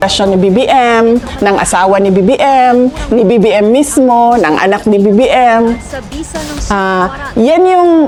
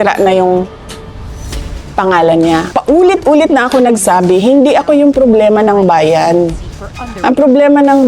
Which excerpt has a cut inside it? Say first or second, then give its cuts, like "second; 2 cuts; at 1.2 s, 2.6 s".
second; 1 cut; at 2.7 s